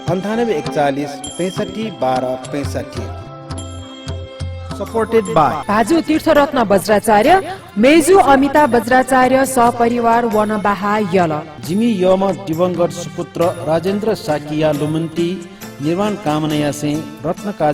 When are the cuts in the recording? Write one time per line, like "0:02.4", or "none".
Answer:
0:04.6